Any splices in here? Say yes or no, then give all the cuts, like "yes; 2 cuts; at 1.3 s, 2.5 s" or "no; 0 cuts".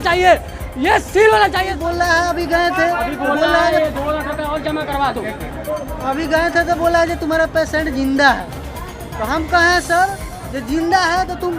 yes; 1 cut; at 1.7 s